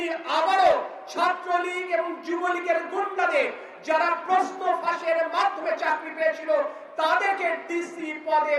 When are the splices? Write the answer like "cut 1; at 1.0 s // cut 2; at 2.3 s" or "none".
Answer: none